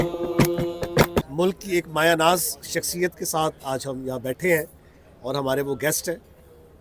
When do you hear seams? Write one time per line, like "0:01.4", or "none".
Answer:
0:01.3